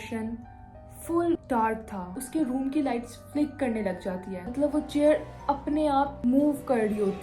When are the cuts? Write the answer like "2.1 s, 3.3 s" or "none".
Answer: 2.1 s, 4.5 s

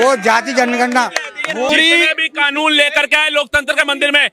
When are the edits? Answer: 1.7 s

